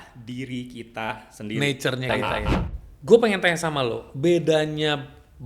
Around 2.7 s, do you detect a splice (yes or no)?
yes